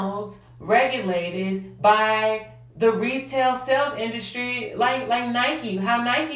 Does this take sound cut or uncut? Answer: uncut